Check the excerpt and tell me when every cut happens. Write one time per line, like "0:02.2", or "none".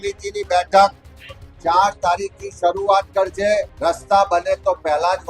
0:03.7